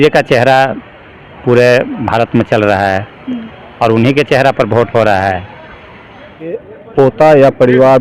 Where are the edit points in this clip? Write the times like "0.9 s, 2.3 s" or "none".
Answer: 6.6 s